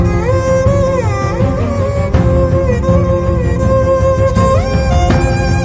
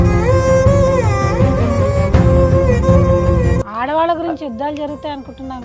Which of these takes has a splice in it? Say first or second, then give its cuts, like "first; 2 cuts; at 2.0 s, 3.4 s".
second; 1 cut; at 3.6 s